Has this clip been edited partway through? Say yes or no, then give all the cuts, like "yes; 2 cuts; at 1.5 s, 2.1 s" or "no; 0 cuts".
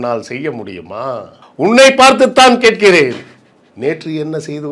yes; 1 cut; at 1.4 s